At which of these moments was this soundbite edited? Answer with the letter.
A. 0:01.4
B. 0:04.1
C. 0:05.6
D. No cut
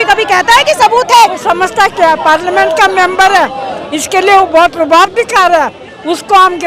A